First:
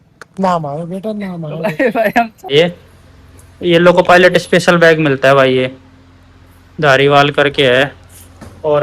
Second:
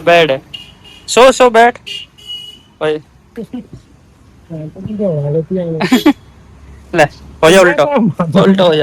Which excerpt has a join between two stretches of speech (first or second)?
first